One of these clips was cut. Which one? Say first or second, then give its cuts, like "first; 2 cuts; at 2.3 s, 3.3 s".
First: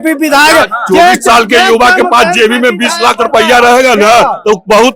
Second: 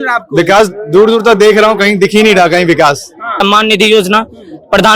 second; 1 cut; at 3.4 s